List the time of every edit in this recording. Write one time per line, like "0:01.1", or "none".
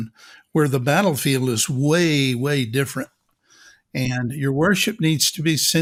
none